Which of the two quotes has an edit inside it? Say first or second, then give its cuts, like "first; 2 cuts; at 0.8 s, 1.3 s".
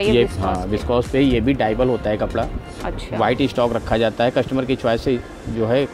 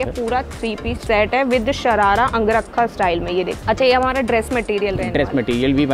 second; 2 cuts; at 1.0 s, 3.6 s